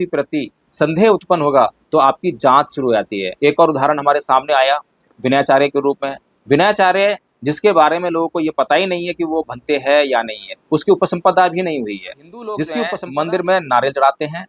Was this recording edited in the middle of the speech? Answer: yes; 2 cuts; at 3.2 s, 13.0 s

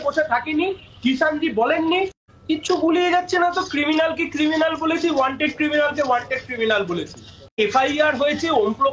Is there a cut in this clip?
yes; 2 cuts; at 2.3 s, 7.5 s

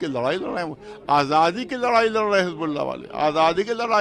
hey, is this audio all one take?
yes; 0 cuts

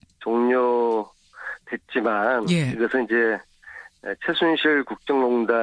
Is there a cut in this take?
yes; 1 cut; at 2.4 s

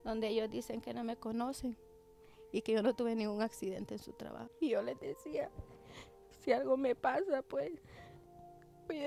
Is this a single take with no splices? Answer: no; 1 cut; at 4.4 s

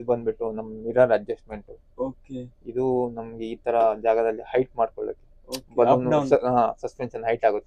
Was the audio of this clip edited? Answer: no; 0 cuts

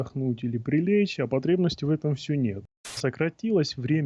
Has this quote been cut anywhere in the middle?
yes; 1 cut; at 2.9 s

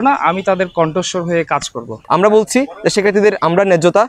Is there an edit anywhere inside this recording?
yes; 1 cut; at 2.0 s

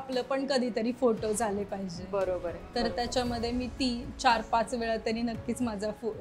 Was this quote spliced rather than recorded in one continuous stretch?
no; 0 cuts

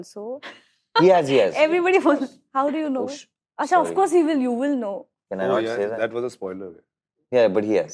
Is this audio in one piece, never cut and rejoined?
yes; 0 cuts

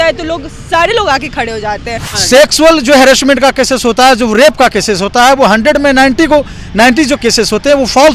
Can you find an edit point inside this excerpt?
yes; 1 cut; at 2.1 s

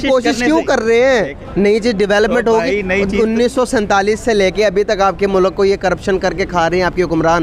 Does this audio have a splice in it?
yes; 1 cut; at 1.4 s

